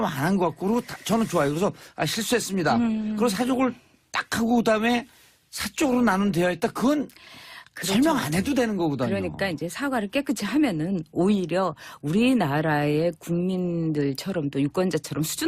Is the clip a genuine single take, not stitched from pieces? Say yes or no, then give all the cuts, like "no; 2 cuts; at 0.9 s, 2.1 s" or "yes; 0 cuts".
yes; 0 cuts